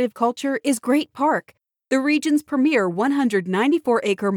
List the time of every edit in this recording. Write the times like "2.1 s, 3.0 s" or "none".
none